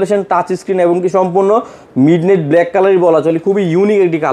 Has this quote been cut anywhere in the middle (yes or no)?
no